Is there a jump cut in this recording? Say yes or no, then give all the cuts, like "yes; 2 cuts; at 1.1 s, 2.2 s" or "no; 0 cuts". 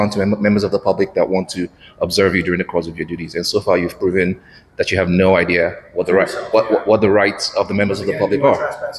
no; 0 cuts